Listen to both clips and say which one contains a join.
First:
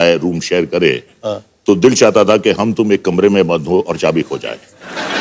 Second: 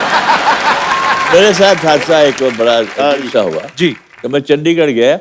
second; 2 cuts; at 1.3 s, 4.1 s

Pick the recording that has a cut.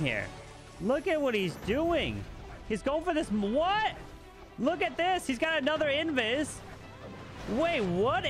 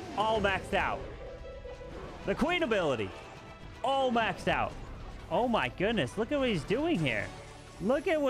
second; 1 cut; at 4.8 s

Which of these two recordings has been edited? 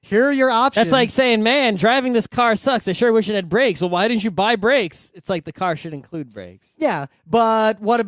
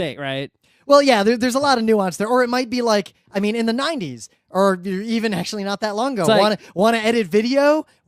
second; 1 cut; at 2.3 s

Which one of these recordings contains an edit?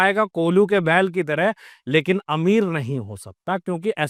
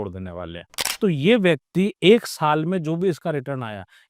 second; 1 cut; at 1.0 s

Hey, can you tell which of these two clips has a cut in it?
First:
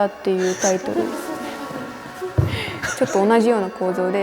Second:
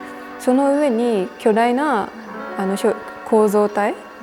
first; 1 cut; at 2.9 s

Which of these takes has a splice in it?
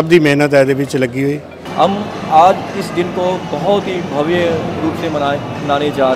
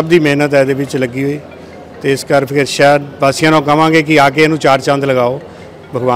first; 1 cut; at 1.6 s

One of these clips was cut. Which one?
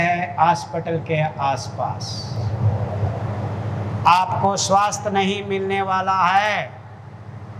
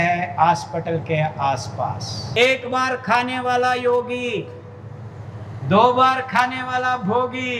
second; 1 cut; at 2.2 s

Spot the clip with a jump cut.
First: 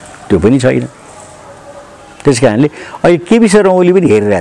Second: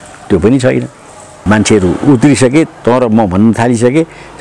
second; 1 cut; at 1.4 s

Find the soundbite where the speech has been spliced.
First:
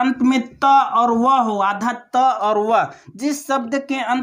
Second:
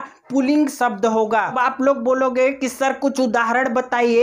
second; 1 cut; at 1.6 s

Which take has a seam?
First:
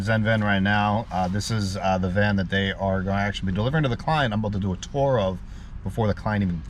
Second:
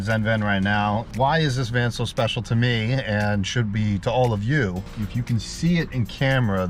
second; 1 cut; at 1.1 s

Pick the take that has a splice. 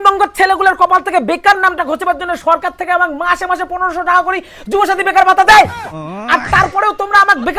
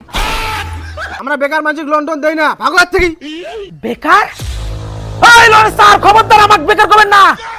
second; 1 cut; at 1.1 s

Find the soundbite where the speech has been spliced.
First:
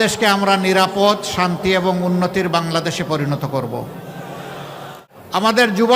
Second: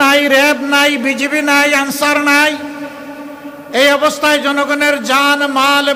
first; 1 cut; at 5.1 s

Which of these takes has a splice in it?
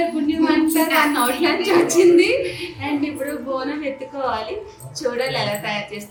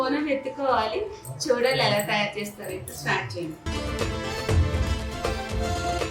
second; 1 cut; at 3.6 s

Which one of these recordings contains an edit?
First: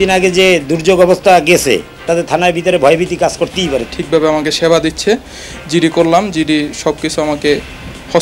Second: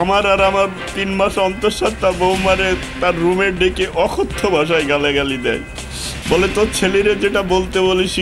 first; 1 cut; at 3.8 s

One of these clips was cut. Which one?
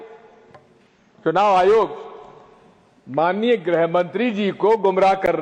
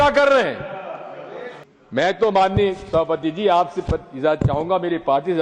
second; 1 cut; at 1.6 s

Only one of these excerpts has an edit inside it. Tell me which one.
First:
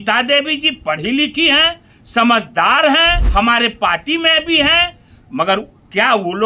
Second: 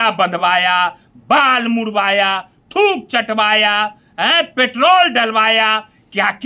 first; 1 cut; at 3.2 s

